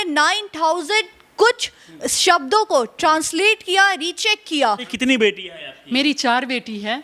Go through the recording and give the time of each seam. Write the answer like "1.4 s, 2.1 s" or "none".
4.9 s